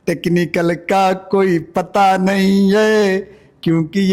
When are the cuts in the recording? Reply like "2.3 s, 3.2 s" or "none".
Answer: none

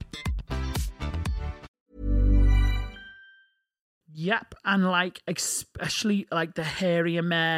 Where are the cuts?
1.7 s, 4.0 s

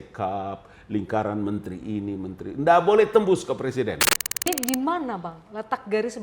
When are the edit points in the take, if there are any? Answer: 4.5 s

